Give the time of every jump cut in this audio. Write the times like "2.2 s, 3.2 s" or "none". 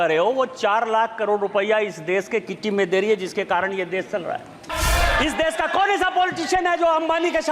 4.7 s